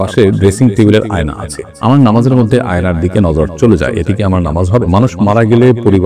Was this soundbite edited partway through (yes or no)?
yes